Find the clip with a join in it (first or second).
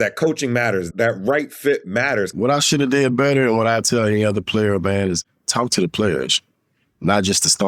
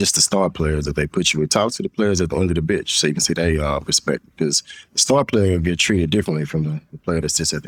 first